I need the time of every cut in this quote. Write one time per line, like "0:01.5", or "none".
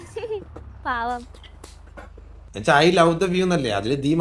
0:02.5